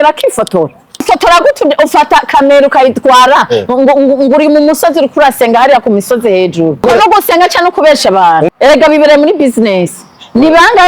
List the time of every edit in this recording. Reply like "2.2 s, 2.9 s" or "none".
1.1 s, 6.8 s, 8.5 s